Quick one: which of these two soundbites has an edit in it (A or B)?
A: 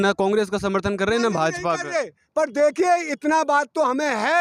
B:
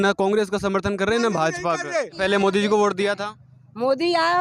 B